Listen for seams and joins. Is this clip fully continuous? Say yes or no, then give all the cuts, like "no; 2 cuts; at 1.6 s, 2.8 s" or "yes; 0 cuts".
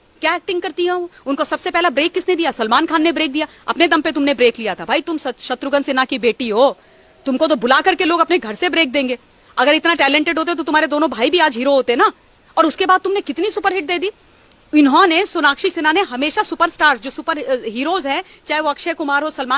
yes; 0 cuts